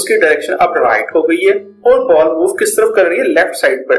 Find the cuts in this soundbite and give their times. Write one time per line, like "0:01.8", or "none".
0:01.7

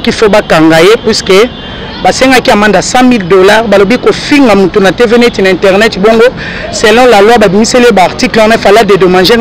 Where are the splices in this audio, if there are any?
none

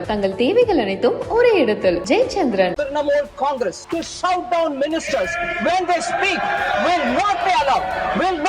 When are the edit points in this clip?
0:02.7
0:03.8

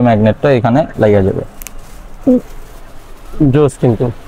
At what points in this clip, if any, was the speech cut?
none

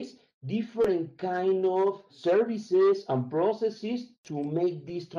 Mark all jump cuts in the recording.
0:04.2

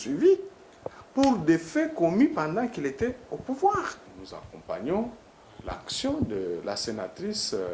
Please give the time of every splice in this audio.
0:04.0

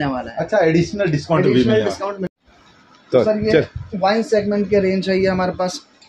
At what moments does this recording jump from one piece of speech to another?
0:02.4

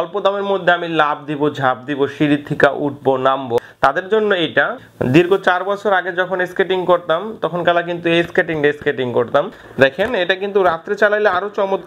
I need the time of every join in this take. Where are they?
0:03.6
0:04.8
0:09.6

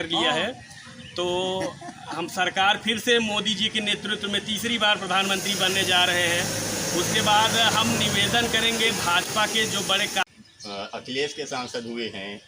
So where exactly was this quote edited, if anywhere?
0:10.2

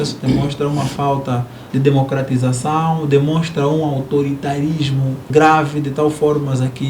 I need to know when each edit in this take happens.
0:01.6
0:05.2

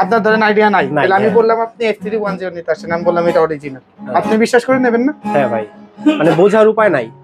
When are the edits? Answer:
none

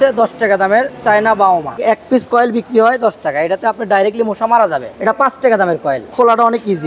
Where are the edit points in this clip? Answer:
0:01.8
0:04.9
0:06.0

